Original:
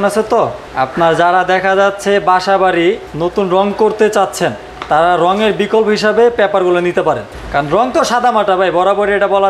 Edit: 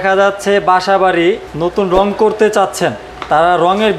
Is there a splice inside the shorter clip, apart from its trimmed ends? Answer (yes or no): no